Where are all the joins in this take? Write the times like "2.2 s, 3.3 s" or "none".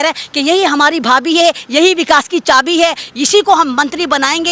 none